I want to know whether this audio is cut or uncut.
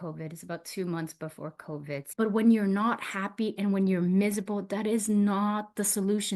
cut